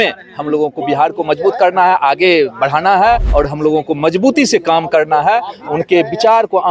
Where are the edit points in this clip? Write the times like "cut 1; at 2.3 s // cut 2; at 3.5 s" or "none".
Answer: cut 1; at 3.3 s

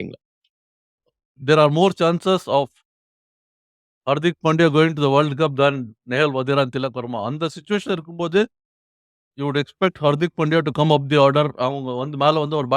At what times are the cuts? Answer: cut 1; at 1.3 s

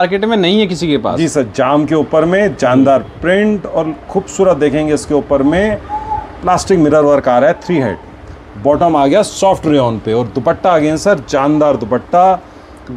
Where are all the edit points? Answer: none

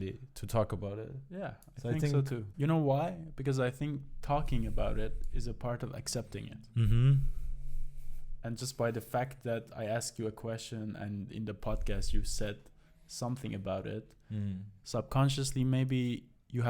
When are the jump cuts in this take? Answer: cut 1; at 2.4 s

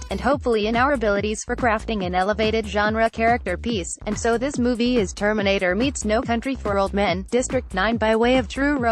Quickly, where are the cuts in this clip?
none

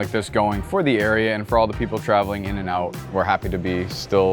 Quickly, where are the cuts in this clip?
cut 1; at 3.1 s

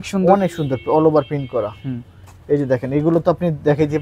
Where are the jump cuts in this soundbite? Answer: none

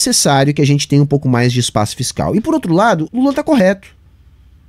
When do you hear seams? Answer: cut 1; at 3.1 s

